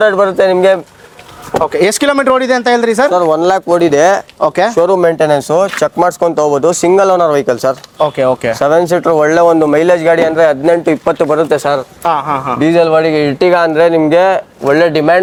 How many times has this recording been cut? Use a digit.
0